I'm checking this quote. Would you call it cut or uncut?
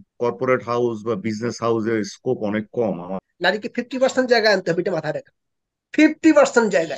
cut